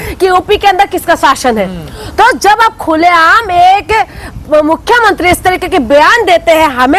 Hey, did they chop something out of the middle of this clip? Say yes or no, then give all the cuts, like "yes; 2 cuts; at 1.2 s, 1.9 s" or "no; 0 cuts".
no; 0 cuts